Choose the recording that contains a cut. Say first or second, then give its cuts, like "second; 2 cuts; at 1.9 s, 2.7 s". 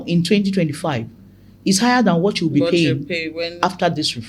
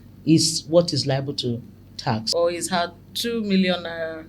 second; 1 cut; at 2.2 s